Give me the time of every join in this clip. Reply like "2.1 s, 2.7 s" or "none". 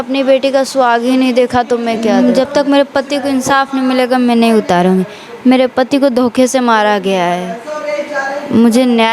2.1 s